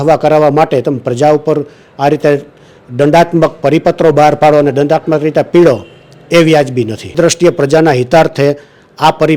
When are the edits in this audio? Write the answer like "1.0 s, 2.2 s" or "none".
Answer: 7.1 s